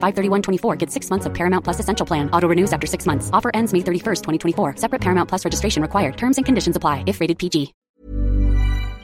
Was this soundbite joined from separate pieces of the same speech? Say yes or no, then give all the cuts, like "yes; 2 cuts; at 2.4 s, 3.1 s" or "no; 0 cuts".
yes; 1 cut; at 7.8 s